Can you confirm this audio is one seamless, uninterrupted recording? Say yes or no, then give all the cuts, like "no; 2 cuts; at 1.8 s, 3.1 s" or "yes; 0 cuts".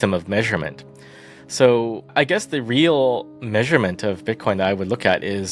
no; 1 cut; at 2.1 s